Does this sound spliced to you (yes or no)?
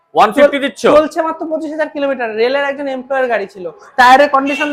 no